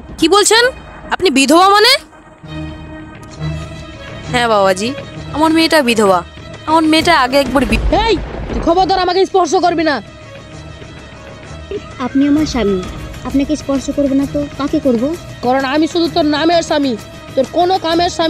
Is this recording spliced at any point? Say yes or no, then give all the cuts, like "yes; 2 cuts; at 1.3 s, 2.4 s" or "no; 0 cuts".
yes; 1 cut; at 7.7 s